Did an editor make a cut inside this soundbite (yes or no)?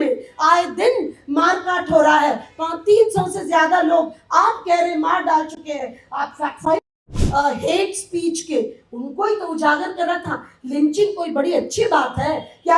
yes